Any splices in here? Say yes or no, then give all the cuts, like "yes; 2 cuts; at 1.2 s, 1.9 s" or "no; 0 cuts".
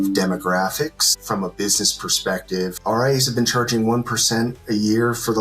yes; 2 cuts; at 1.1 s, 2.8 s